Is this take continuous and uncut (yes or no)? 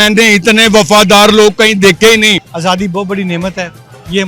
no